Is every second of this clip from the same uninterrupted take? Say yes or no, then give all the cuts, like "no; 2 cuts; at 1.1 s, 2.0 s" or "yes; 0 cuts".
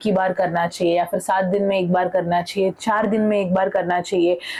yes; 0 cuts